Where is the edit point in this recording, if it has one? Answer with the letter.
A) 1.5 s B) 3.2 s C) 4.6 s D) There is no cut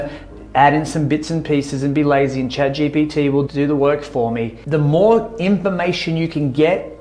C